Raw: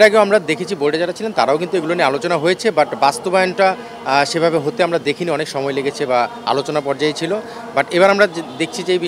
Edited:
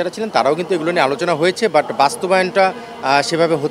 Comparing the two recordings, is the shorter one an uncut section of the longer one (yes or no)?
yes